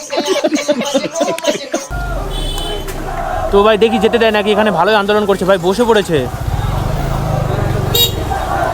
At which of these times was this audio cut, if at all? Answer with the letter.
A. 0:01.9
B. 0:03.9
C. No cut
A